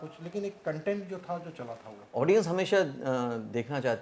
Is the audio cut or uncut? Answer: cut